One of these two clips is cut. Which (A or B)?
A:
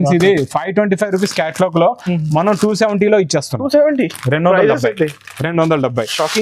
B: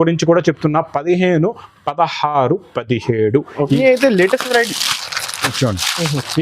B